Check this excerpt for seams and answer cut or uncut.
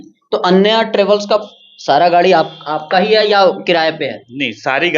uncut